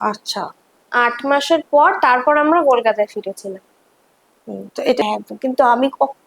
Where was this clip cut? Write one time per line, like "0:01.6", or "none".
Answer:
0:05.0